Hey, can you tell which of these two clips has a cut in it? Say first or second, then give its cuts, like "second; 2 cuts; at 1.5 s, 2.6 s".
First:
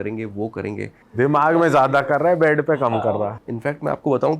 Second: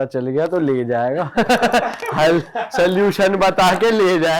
first; 2 cuts; at 1.0 s, 2.9 s